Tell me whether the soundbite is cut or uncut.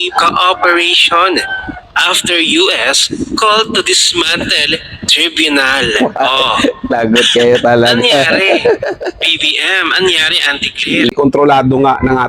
cut